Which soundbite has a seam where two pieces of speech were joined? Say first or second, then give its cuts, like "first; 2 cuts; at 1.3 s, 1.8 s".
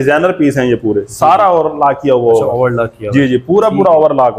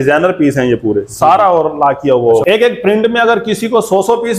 second; 1 cut; at 2.4 s